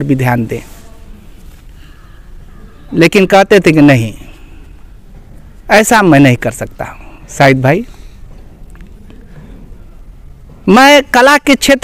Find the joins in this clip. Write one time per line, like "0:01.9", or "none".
none